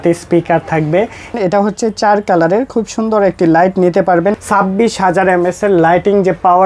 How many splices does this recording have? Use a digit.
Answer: 2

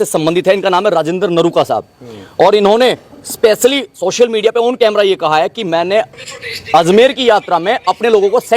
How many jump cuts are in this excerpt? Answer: 0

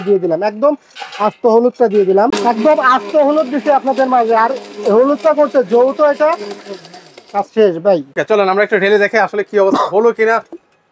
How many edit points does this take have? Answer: 2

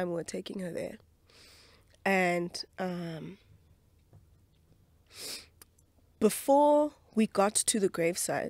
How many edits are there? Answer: 0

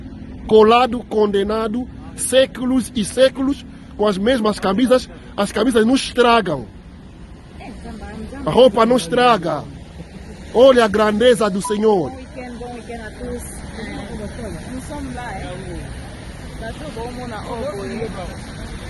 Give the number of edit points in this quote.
1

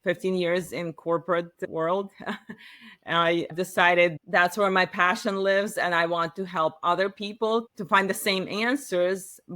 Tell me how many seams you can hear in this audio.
1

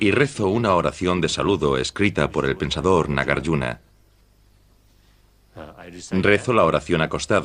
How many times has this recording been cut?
1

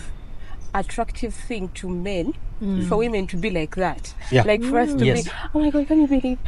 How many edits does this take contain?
0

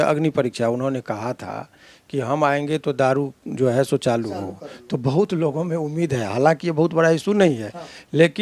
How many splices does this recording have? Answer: 0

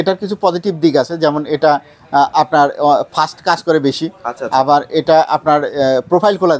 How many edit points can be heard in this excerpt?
0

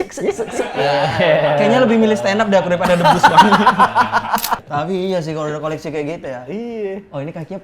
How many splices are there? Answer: 1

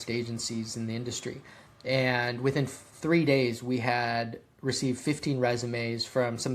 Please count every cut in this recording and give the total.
0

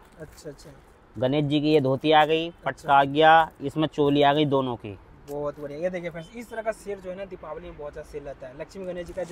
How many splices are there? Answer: 0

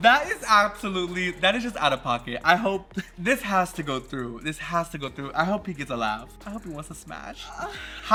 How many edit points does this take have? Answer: 0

